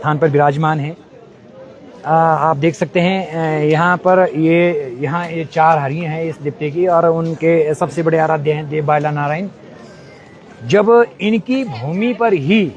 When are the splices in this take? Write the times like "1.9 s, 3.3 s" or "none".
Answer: none